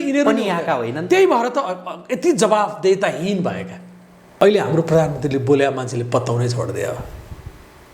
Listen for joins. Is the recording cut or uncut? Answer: cut